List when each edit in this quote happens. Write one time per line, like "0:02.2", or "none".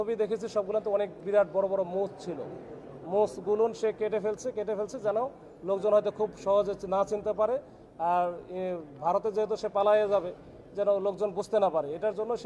none

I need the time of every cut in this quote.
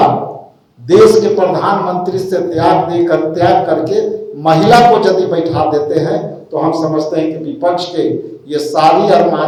none

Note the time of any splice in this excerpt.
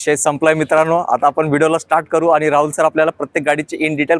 none

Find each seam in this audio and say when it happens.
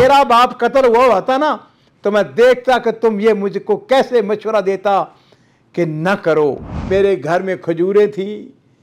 0:06.8

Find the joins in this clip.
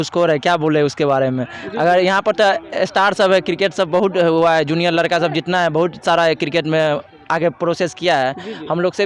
none

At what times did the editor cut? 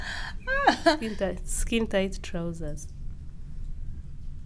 0:01.1

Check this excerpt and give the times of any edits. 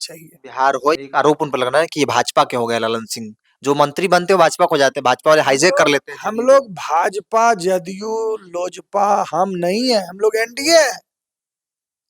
0:01.0

